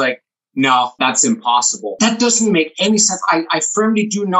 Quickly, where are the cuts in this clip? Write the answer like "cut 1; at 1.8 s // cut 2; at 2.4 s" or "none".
cut 1; at 0.9 s // cut 2; at 1.9 s